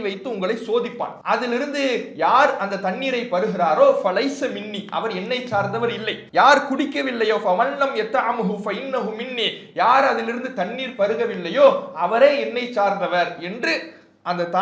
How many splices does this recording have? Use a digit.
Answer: 2